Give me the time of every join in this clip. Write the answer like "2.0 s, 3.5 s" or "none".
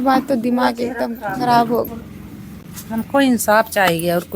1.9 s